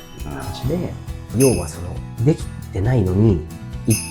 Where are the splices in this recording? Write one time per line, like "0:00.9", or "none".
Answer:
0:01.3